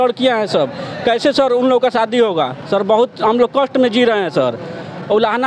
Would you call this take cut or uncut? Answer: uncut